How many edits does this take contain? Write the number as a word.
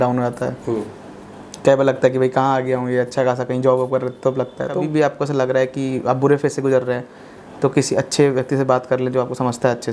one